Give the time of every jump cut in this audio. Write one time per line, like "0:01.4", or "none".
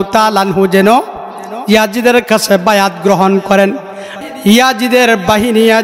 0:04.1

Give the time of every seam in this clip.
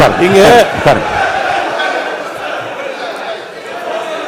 none

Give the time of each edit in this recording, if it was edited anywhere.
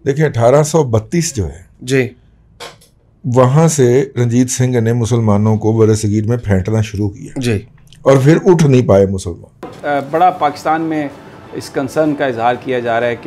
0:09.7

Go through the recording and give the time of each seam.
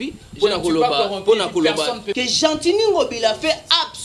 0:02.1

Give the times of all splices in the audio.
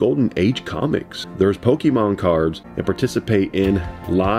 0:01.2
0:02.7

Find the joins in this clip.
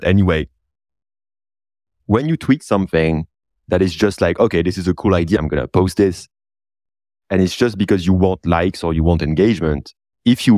0:05.4

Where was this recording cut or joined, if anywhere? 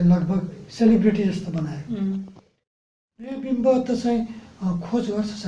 0:02.8

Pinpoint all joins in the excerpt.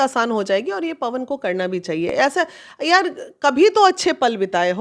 none

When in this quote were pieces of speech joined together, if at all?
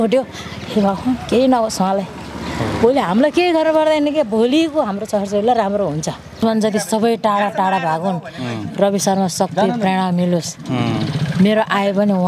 0:06.4

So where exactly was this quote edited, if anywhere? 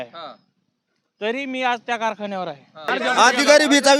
0:02.9

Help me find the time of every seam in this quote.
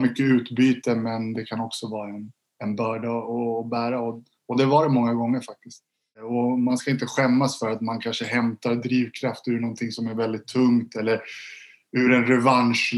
0:06.2

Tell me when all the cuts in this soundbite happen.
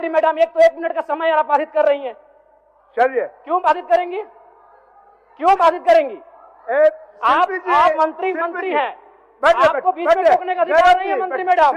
none

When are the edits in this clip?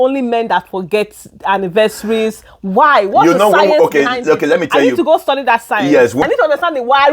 0:06.2

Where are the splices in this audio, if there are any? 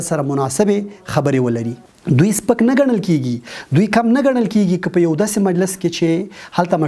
0:01.8

